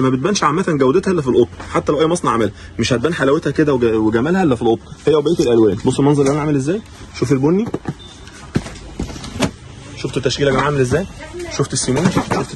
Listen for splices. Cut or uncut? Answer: uncut